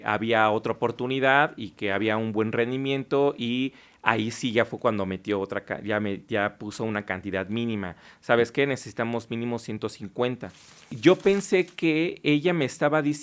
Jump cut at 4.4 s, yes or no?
no